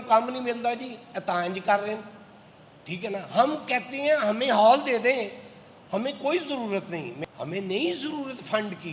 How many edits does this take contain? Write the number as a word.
one